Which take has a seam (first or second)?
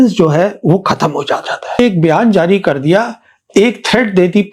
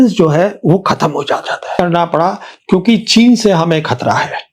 first